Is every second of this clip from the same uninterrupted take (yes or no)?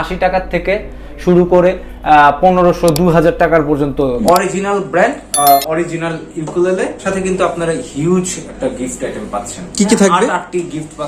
no